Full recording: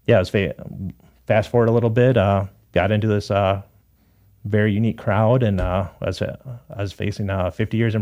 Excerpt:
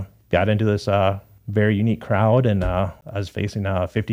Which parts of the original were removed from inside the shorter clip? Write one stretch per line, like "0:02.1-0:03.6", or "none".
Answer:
0:03.8-0:04.3
0:05.9-0:06.6